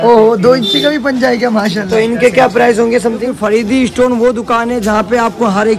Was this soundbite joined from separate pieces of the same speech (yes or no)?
yes